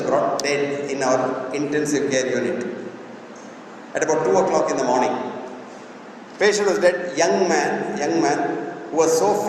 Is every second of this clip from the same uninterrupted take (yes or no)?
yes